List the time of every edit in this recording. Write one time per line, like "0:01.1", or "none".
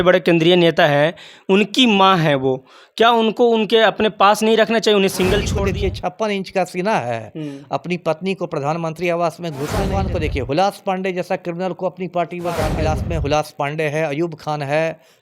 0:05.5
0:10.0
0:12.7